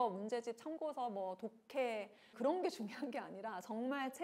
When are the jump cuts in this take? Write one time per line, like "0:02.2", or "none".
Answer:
0:02.3